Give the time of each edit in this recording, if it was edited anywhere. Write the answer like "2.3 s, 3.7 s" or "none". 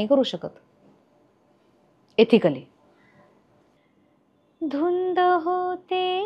3.7 s